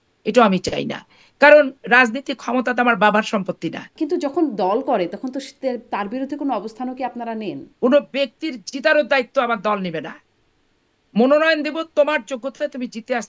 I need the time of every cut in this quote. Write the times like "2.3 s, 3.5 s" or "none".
3.9 s, 7.6 s